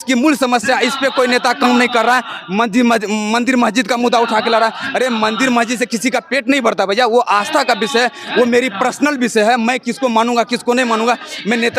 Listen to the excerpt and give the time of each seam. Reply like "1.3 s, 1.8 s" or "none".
none

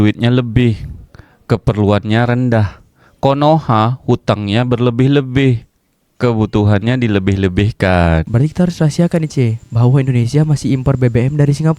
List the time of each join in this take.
8.3 s

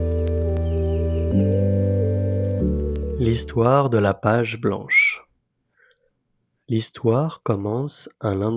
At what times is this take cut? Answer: 3.2 s

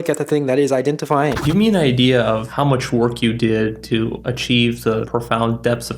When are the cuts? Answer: 1.4 s, 2.5 s, 4.2 s, 5.1 s

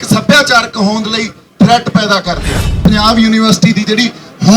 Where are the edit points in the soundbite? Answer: 2.7 s

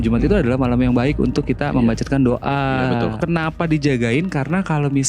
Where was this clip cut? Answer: 3.2 s

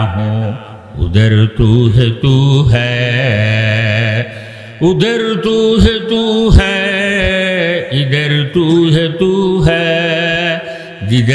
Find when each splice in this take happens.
none

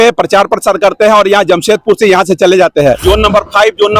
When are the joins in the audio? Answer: 3.0 s

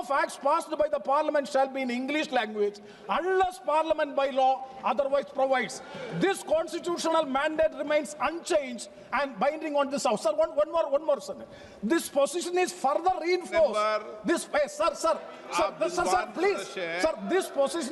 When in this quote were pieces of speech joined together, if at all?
none

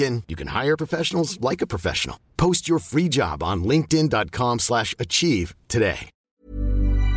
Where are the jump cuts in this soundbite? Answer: 6.1 s

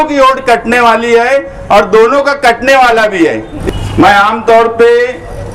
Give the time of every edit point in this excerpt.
3.5 s

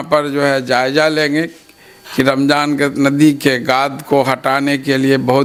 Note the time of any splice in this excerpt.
none

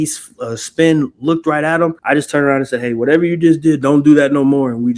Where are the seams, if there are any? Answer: 2.0 s

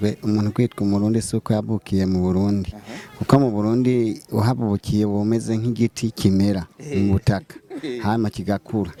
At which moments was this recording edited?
none

